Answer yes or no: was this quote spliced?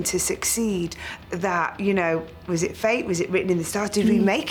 no